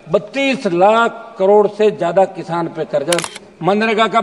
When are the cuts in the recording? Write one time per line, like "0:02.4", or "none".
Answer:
0:03.2